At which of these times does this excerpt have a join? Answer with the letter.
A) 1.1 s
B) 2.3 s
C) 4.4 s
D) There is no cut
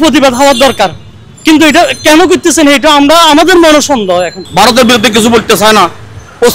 C